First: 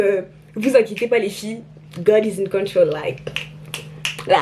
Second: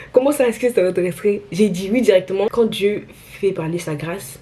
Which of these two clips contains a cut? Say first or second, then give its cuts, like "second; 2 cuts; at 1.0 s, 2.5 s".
second; 1 cut; at 2.5 s